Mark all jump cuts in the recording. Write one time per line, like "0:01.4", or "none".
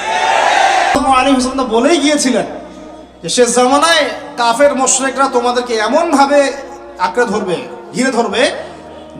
0:01.0